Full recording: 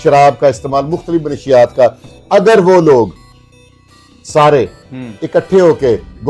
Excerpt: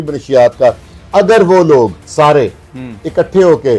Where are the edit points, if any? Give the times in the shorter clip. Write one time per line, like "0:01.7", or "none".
0:02.0